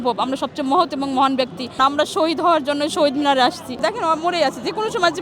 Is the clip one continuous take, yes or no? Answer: no